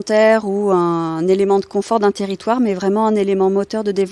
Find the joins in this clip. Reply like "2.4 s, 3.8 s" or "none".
none